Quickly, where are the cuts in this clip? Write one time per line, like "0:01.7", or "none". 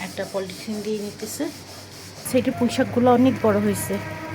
0:02.3